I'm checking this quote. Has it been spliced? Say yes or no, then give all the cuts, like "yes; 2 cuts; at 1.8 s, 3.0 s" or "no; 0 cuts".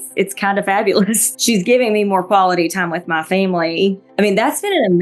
yes; 2 cuts; at 1.2 s, 4.0 s